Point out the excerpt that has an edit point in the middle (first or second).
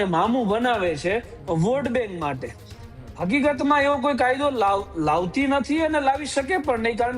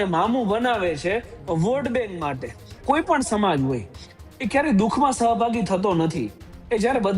second